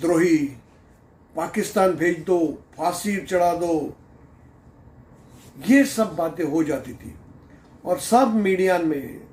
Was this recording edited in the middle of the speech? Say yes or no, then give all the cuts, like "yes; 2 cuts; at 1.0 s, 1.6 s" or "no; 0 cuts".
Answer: no; 0 cuts